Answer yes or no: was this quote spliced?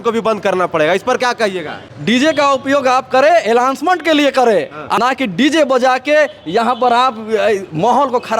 yes